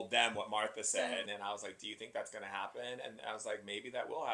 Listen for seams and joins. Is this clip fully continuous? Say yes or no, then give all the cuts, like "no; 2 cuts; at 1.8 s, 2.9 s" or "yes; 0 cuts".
no; 1 cut; at 1.3 s